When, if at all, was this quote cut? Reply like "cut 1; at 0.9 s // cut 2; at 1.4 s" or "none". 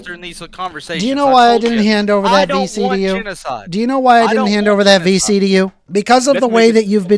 cut 1; at 5.8 s

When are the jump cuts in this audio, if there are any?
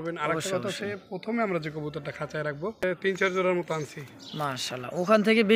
cut 1; at 2.8 s

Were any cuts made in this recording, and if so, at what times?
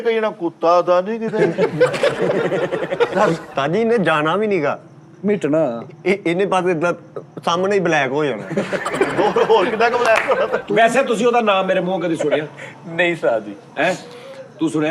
cut 1; at 3.5 s // cut 2; at 10.6 s

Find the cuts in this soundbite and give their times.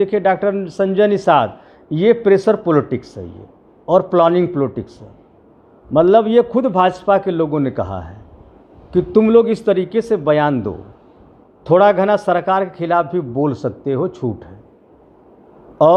none

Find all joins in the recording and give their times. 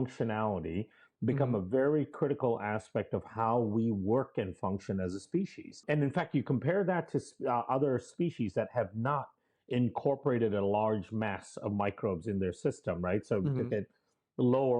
cut 1; at 5.8 s

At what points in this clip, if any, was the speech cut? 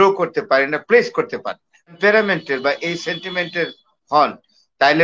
cut 1; at 2.0 s

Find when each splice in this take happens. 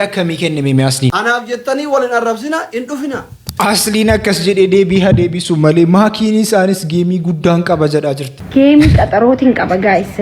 cut 1; at 3.4 s

